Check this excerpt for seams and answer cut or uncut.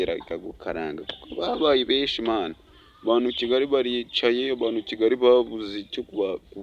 uncut